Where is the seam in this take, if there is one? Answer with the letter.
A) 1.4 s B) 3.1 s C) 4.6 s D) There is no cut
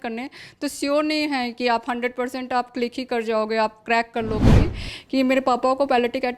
C